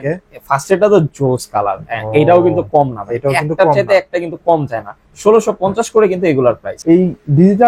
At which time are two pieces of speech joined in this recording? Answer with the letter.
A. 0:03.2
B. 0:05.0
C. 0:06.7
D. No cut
C